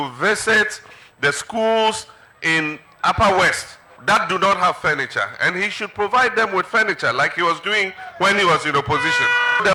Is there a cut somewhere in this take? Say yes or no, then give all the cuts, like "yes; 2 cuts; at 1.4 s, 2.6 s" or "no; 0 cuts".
no; 0 cuts